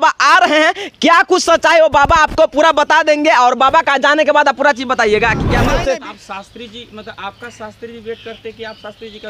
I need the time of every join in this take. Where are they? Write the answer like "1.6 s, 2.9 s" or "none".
5.7 s